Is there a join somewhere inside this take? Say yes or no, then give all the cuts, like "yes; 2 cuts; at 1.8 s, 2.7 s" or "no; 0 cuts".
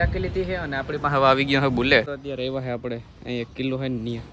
yes; 1 cut; at 2.1 s